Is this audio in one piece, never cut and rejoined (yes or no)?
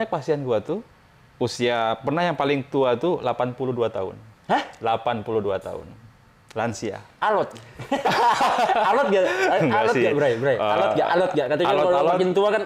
yes